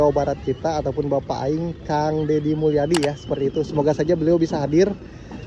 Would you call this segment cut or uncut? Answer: uncut